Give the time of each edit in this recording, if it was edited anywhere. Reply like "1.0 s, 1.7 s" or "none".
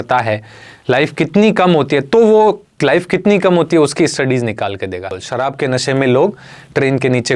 5.2 s